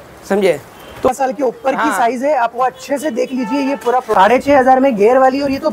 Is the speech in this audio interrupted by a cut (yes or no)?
yes